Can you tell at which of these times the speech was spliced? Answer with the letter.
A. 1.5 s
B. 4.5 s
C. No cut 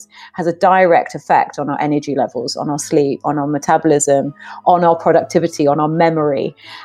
C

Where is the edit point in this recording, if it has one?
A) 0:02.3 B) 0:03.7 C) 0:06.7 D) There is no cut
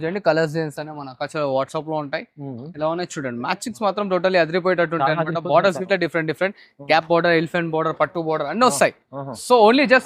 D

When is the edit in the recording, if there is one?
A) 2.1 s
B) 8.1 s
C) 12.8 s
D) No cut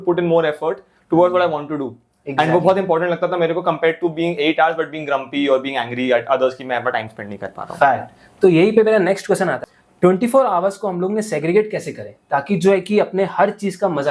D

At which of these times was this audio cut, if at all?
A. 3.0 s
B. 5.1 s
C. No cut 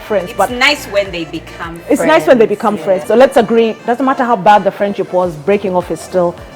A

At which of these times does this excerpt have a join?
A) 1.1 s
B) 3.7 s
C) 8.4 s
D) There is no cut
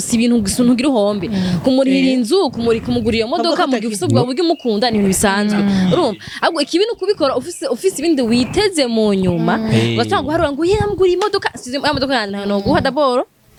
D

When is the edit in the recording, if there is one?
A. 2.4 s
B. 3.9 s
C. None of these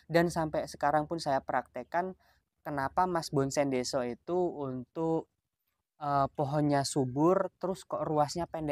C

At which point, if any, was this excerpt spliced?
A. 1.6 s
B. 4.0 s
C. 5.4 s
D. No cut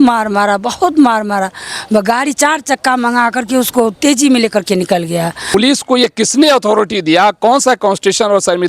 C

